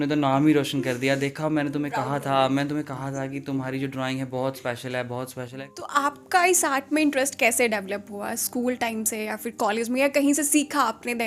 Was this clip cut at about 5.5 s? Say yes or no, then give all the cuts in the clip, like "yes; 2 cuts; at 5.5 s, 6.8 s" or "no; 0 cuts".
yes; 1 cut; at 5.5 s